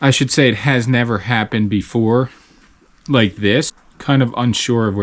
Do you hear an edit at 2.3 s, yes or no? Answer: no